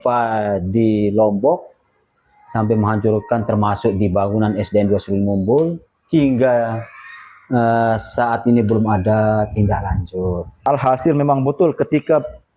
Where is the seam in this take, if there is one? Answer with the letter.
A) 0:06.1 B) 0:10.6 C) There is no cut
B